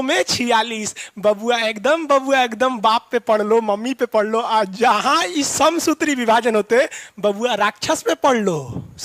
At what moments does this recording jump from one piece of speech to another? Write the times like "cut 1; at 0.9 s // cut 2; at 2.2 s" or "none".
none